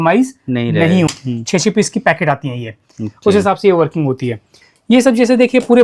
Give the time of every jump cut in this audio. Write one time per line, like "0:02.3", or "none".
0:01.1
0:04.6